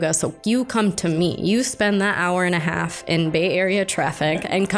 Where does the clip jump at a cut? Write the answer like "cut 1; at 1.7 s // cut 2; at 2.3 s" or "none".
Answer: none